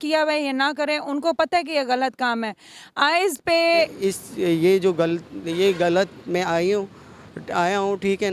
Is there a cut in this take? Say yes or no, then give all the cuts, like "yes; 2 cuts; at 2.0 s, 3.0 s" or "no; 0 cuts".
yes; 1 cut; at 3.9 s